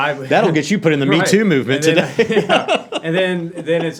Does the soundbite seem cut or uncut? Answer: uncut